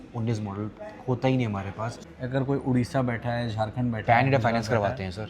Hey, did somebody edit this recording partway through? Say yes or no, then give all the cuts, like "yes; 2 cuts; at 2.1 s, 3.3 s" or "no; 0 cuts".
yes; 1 cut; at 2.0 s